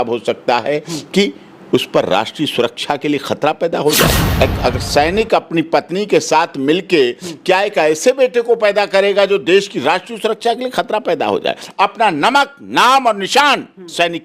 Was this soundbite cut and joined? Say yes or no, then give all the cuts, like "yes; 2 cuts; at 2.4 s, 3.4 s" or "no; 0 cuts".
yes; 2 cuts; at 4.2 s, 11.6 s